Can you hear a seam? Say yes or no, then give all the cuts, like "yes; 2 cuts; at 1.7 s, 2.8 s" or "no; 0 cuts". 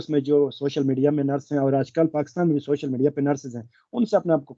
no; 0 cuts